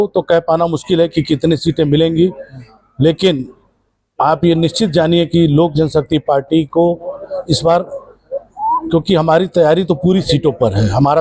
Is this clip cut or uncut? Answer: uncut